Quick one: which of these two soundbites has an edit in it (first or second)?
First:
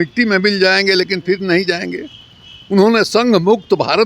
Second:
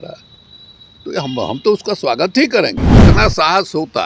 second